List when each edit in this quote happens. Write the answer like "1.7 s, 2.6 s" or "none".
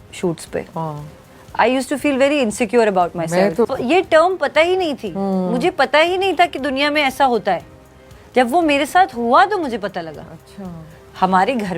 none